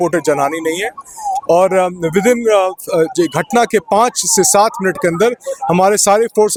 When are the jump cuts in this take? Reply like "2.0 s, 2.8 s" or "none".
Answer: none